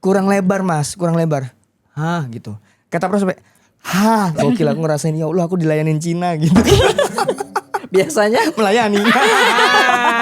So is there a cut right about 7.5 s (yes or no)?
no